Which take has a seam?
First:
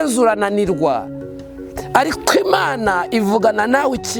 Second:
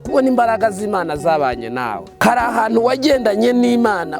second; 1 cut; at 2.2 s

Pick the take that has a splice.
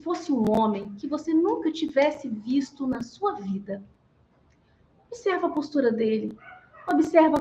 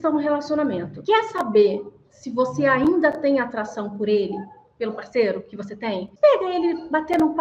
second; 2 cuts; at 0.9 s, 6.1 s

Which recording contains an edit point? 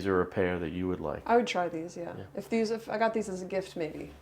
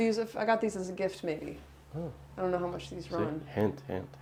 first; 1 cut; at 1.2 s

